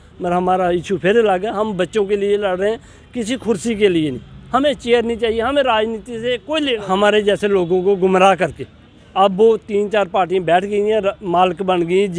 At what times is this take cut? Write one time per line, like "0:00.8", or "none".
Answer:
0:06.8